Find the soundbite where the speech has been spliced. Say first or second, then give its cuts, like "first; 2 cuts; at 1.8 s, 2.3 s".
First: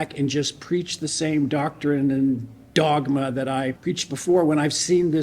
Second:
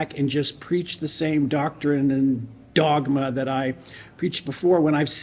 first; 1 cut; at 3.8 s